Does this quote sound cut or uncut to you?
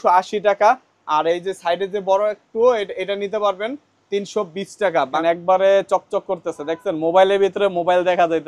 cut